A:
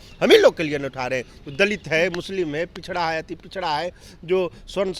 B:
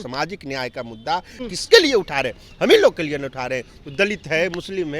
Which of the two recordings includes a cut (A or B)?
B